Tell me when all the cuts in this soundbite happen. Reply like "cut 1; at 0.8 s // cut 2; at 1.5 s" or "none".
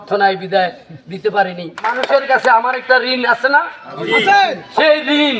cut 1; at 1.8 s